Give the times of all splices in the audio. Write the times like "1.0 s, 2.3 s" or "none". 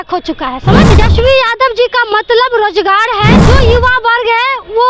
0.9 s, 3.4 s